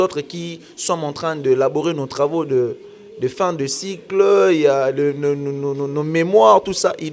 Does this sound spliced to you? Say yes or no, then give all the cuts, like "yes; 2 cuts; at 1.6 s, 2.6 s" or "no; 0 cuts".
no; 0 cuts